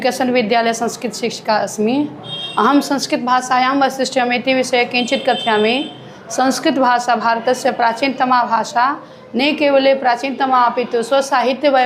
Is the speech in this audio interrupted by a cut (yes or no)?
no